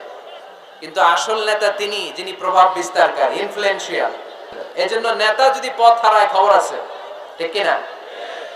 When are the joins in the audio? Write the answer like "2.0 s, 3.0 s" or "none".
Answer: 4.5 s